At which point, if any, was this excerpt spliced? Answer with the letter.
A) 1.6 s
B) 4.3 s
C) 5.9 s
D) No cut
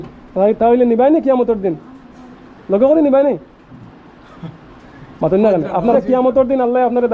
C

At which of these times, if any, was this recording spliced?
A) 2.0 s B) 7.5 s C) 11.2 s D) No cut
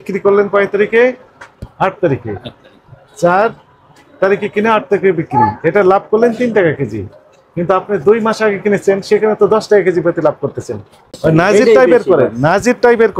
C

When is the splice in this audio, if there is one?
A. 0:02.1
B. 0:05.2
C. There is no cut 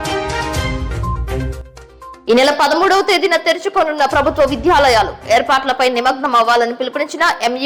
C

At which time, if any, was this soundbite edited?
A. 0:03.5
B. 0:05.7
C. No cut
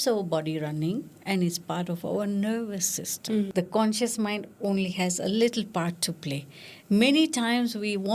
A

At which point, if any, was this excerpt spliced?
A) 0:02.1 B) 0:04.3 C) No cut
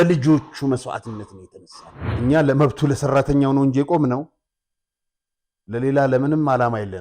A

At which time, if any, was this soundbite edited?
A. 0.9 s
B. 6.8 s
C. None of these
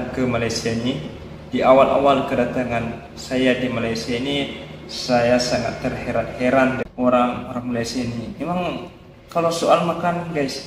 B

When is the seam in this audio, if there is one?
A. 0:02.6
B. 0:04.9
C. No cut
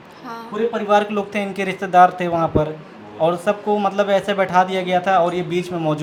C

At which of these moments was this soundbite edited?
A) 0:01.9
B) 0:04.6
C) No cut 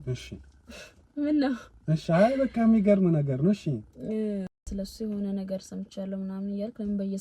B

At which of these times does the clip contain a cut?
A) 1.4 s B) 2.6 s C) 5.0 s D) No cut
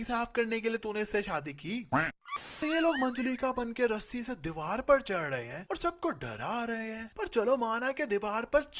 B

